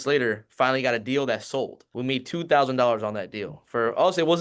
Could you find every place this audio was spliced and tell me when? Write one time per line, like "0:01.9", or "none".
0:01.8